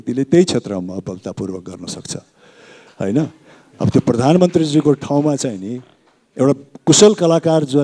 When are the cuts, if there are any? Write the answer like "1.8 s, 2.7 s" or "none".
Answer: none